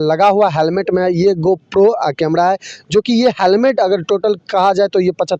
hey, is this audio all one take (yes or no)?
yes